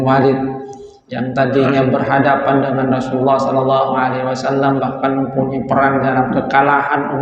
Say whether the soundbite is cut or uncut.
uncut